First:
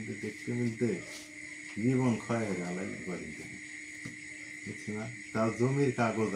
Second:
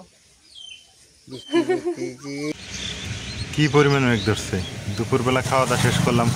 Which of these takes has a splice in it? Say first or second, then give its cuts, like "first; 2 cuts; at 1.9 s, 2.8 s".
second; 1 cut; at 2.5 s